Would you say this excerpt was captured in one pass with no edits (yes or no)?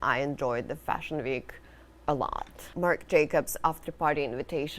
no